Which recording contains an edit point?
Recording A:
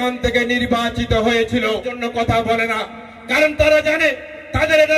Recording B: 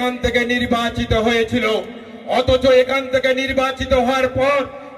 A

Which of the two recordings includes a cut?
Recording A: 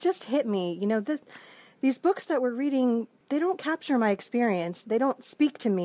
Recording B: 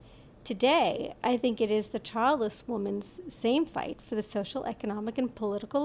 A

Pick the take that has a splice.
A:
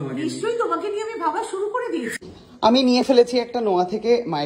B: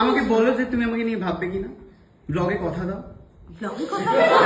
A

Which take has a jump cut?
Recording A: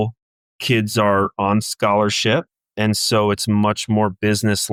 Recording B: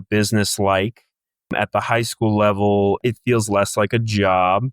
B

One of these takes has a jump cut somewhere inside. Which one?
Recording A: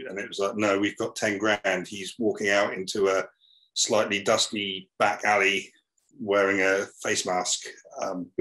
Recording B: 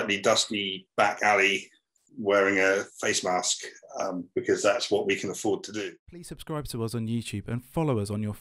B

